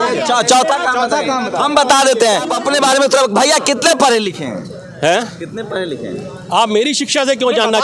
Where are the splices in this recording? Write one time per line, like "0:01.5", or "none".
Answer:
0:02.6